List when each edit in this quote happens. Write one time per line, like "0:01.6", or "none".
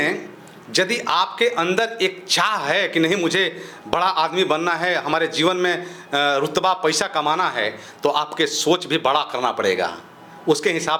none